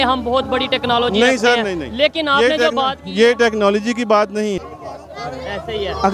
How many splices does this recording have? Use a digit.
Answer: 1